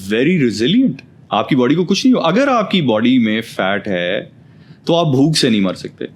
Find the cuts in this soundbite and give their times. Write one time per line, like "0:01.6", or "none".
none